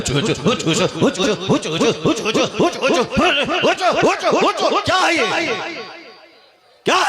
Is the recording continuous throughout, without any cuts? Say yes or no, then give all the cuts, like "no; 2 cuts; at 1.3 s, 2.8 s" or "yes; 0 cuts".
no; 1 cut; at 1.2 s